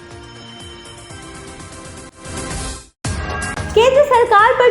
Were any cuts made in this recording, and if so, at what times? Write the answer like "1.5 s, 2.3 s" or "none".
2.1 s

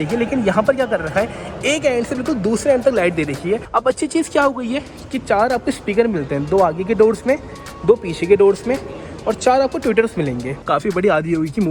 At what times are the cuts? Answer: 3.6 s, 10.5 s

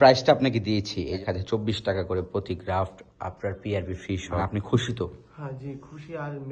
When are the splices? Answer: 1.2 s, 4.4 s

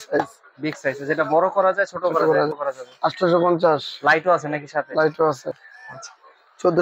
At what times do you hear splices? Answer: 2.6 s, 5.7 s

